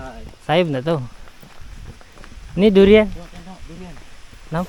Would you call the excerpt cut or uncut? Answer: uncut